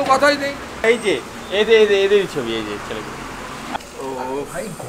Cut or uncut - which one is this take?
cut